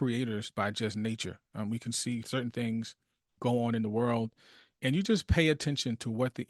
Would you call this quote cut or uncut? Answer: cut